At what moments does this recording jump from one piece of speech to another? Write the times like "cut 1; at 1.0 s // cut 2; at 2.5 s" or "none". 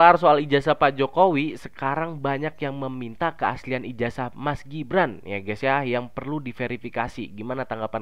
none

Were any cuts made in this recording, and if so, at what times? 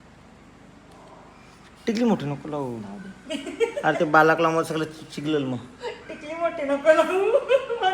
none

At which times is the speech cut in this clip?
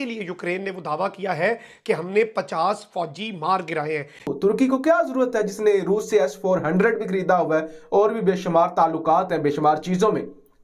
cut 1; at 4.2 s

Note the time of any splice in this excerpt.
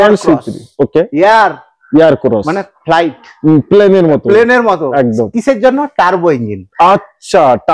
none

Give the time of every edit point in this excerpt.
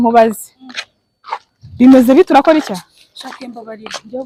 none

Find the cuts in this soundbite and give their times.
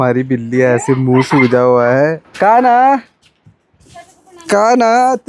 cut 1; at 2.2 s

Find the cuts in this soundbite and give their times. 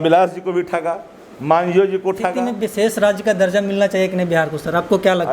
cut 1; at 2.6 s

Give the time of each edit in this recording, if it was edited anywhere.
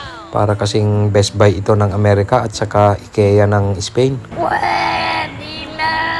cut 1; at 4.2 s

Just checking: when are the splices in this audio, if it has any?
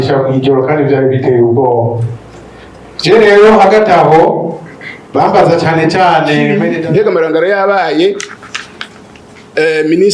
cut 1; at 6.7 s

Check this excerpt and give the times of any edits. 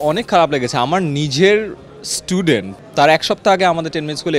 cut 1; at 2.8 s

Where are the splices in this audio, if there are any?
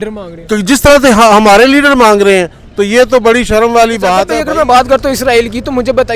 cut 1; at 4.3 s

